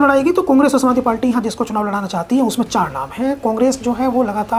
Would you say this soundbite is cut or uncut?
uncut